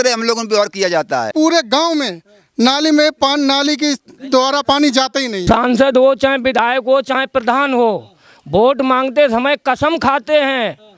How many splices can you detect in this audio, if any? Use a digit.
2